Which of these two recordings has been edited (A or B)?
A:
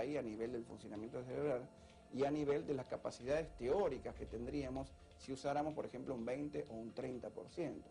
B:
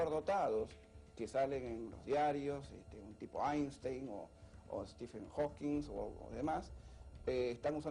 B